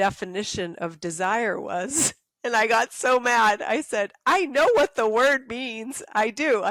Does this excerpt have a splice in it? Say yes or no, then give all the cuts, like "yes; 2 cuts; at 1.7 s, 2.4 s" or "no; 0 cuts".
no; 0 cuts